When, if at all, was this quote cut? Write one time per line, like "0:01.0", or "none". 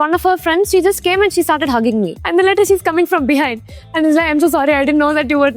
0:02.2